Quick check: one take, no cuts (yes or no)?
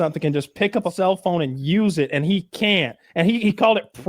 no